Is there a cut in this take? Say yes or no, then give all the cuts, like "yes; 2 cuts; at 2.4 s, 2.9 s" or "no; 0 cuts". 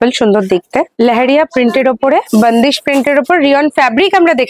yes; 2 cuts; at 0.9 s, 2.3 s